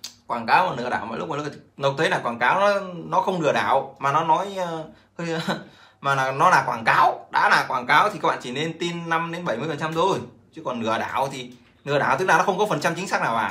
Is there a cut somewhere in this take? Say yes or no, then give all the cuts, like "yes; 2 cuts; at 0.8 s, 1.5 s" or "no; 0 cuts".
no; 0 cuts